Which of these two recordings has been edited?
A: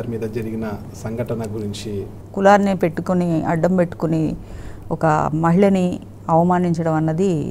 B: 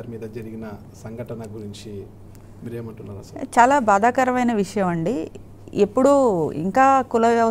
A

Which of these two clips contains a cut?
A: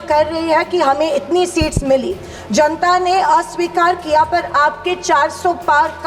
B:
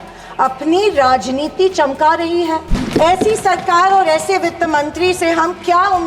B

